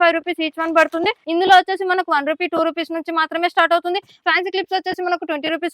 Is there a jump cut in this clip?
yes; 2 cuts; at 1.2 s, 4.1 s

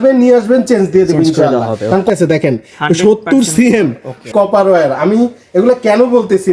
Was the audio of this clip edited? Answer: yes; 2 cuts; at 2.1 s, 4.3 s

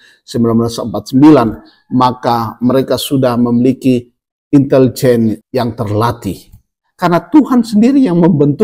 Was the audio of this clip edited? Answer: yes; 3 cuts; at 4.2 s, 5.4 s, 6.8 s

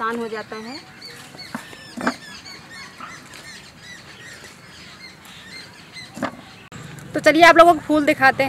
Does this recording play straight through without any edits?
yes; 0 cuts

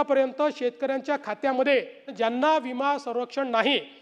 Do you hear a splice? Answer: yes; 1 cut; at 2.1 s

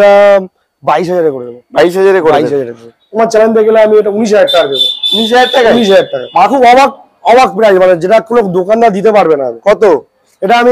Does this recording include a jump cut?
yes; 2 cuts; at 3.1 s, 6.5 s

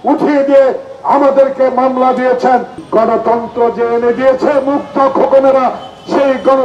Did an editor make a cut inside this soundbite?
yes; 1 cut; at 2.8 s

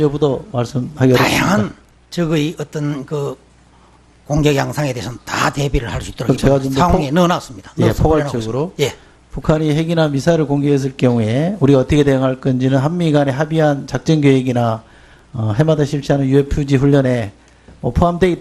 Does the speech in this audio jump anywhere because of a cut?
yes; 1 cut; at 15.7 s

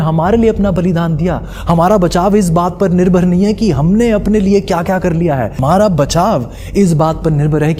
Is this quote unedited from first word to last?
no; 1 cut; at 5.5 s

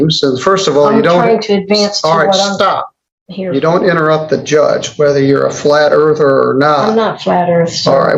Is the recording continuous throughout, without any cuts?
yes; 0 cuts

